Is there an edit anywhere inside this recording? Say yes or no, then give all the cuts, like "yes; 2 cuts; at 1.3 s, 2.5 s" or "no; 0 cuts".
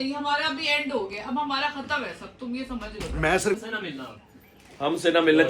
yes; 1 cut; at 3.6 s